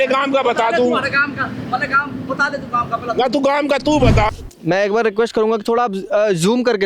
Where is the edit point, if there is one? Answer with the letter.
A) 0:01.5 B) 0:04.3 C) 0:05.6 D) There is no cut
B